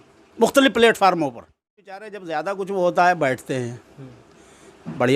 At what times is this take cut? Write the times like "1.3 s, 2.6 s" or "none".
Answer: 2.1 s